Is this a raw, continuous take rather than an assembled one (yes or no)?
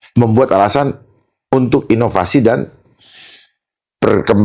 yes